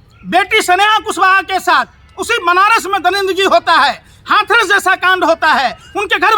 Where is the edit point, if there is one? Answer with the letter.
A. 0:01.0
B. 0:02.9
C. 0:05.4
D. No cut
C